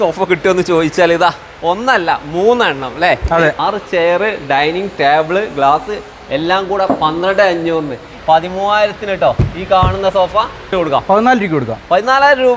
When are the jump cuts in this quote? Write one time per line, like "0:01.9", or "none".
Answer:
0:03.6
0:08.1
0:10.7